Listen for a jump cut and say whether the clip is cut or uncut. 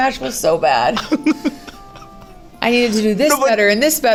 uncut